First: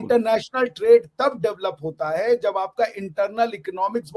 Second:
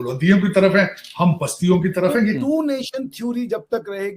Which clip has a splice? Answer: second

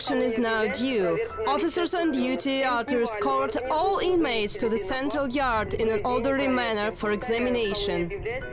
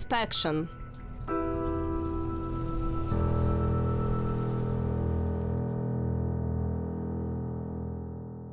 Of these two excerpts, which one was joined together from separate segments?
second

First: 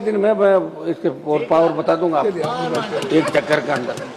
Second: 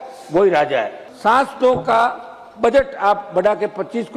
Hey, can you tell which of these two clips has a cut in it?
second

